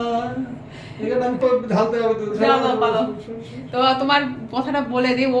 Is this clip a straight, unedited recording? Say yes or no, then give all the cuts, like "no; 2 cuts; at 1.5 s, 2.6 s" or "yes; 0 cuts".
no; 1 cut; at 1.4 s